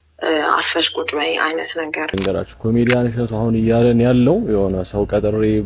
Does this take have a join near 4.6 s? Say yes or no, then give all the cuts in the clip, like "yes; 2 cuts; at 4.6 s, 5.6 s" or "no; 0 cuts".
no; 1 cut; at 2.1 s